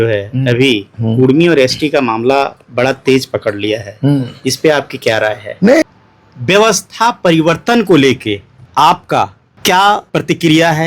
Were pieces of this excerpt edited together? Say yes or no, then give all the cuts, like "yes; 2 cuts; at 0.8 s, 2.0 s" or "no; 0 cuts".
yes; 4 cuts; at 5.8 s, 8.5 s, 9.5 s, 10.1 s